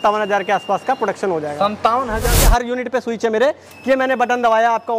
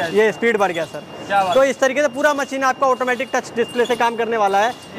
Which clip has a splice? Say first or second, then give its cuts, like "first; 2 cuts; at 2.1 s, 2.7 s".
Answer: first; 1 cut; at 2.3 s